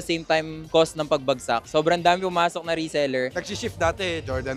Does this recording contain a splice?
yes; 1 cut; at 3.3 s

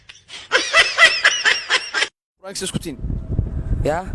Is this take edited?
no; 0 cuts

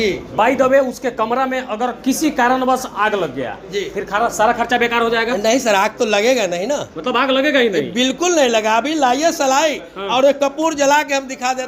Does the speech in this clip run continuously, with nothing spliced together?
yes; 0 cuts

